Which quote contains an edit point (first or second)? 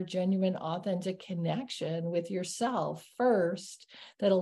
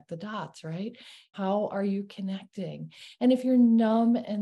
second